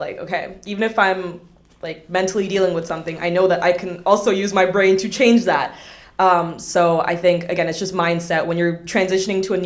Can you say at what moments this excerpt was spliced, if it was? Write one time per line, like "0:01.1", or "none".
none

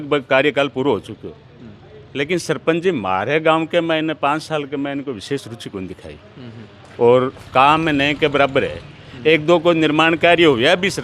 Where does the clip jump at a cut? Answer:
none

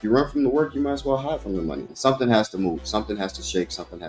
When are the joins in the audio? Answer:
0:01.9

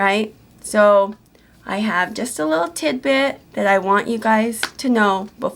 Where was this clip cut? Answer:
none

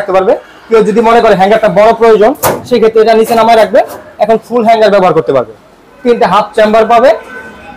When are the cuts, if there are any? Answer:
none

